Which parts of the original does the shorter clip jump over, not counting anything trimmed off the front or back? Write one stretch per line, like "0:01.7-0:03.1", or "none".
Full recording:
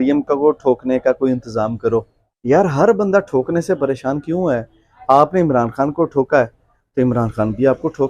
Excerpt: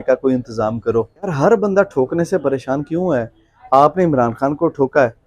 0:02.3-0:02.7